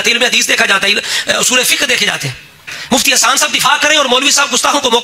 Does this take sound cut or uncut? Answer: cut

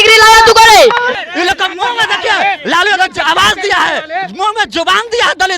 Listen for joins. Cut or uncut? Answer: cut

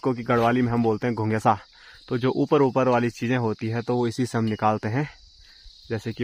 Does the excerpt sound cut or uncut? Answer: uncut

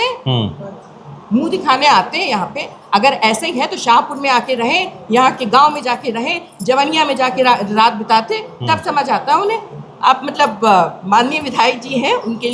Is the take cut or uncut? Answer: uncut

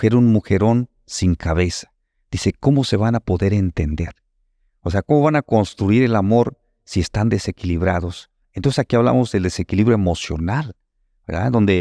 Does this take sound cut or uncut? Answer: uncut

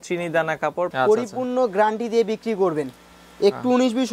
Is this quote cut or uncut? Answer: cut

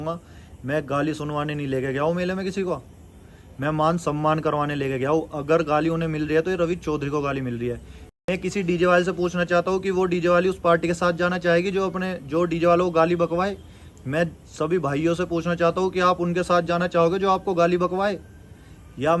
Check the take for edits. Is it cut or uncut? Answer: uncut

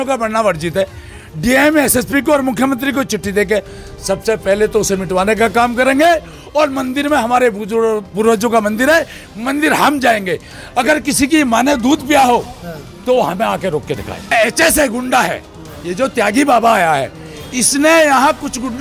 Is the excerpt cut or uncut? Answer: cut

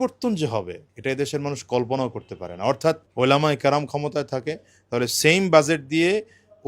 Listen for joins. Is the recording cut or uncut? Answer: cut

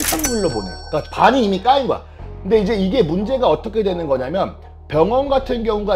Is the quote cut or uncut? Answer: cut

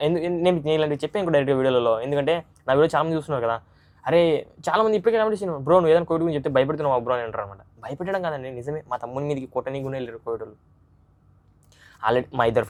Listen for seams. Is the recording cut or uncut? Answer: uncut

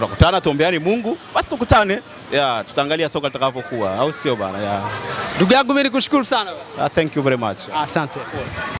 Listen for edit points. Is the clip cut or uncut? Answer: uncut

